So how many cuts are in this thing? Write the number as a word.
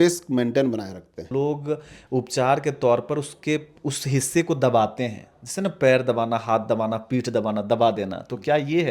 one